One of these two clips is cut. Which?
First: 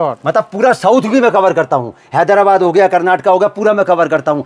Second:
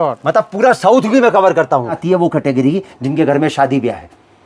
second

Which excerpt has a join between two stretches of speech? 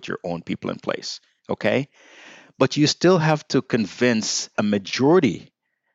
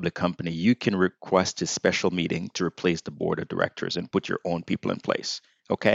first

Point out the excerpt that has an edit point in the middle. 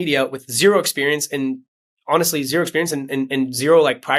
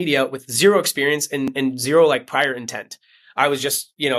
second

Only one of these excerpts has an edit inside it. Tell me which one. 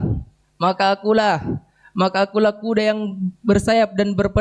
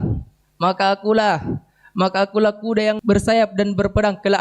second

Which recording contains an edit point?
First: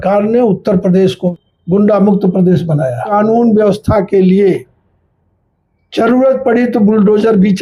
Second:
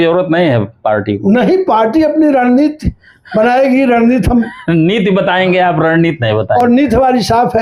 first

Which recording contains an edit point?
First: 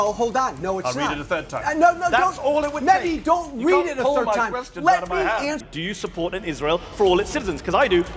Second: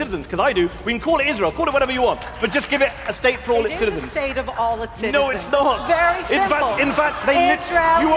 first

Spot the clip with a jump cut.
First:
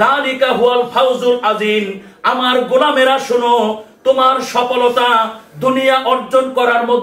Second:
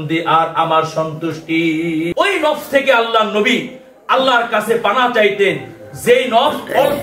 second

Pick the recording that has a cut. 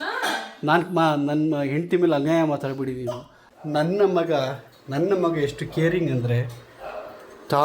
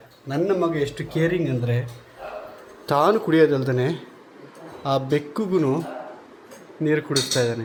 first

